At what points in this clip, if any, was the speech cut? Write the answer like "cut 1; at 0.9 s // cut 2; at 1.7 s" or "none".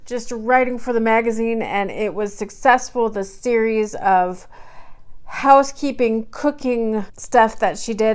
cut 1; at 7.1 s